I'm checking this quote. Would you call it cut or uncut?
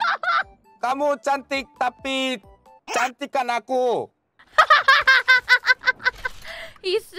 uncut